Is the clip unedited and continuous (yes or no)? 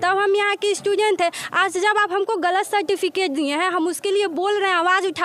yes